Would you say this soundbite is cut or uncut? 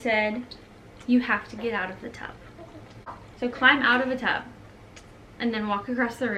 cut